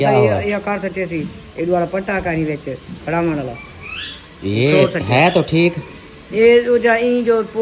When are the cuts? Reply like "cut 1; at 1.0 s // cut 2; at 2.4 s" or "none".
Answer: none